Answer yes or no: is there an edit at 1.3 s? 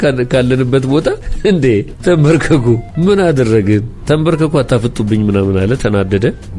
yes